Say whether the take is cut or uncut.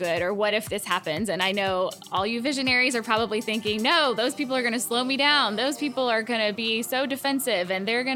uncut